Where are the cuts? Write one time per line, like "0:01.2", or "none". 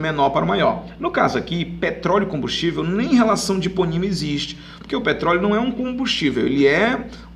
none